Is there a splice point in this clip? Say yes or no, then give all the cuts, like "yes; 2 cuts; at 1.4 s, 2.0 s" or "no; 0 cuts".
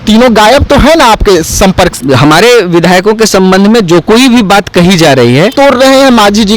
yes; 2 cuts; at 1.9 s, 5.5 s